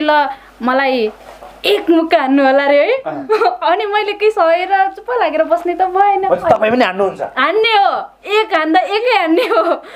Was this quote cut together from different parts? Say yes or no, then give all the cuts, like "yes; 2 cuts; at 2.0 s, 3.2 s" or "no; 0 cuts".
no; 0 cuts